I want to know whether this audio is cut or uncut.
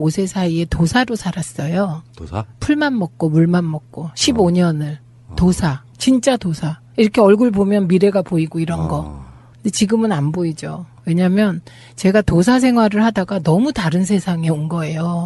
uncut